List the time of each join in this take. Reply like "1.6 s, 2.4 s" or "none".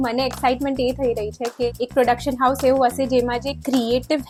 none